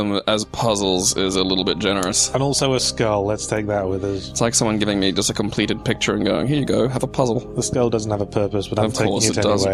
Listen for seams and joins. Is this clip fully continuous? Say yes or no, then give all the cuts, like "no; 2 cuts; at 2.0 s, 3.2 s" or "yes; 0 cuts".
yes; 0 cuts